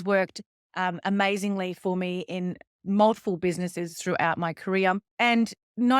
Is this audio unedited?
no; 1 cut; at 5.1 s

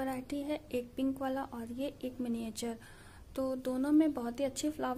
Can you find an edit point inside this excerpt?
no; 0 cuts

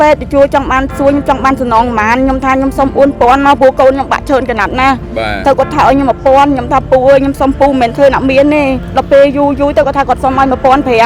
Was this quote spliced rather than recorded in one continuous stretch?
yes; 1 cut; at 8.9 s

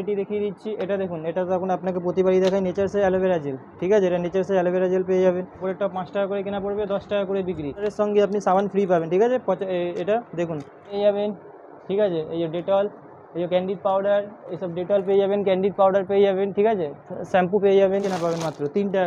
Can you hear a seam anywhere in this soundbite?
yes; 4 cuts; at 5.5 s, 7.9 s, 10.9 s, 18.1 s

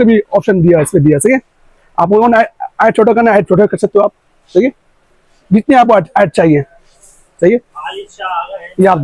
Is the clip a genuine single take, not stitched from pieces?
yes; 0 cuts

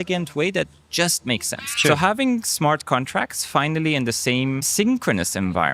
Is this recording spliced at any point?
yes; 2 cuts; at 1.7 s, 4.7 s

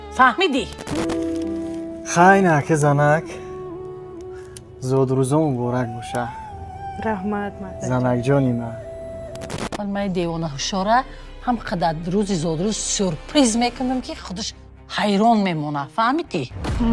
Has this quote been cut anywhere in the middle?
yes; 2 cuts; at 0.9 s, 9.6 s

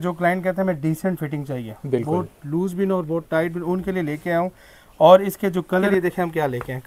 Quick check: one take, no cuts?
no; 1 cut; at 5.9 s

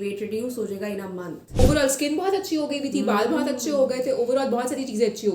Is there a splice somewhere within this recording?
yes; 1 cut; at 1.6 s

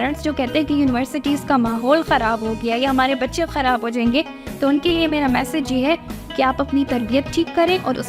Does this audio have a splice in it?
no; 0 cuts

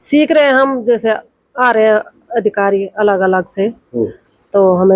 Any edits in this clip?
no; 0 cuts

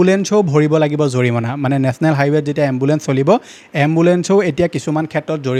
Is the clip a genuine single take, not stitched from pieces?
yes; 0 cuts

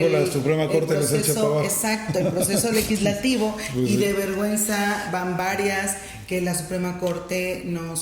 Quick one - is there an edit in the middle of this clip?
no; 0 cuts

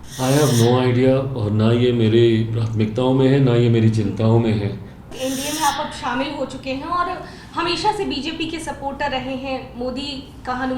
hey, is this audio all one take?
no; 1 cut; at 5.0 s

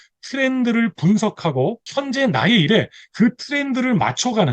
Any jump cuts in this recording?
yes; 1 cut; at 1.9 s

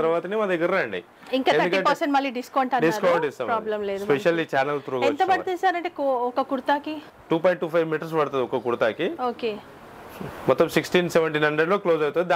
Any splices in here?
no; 0 cuts

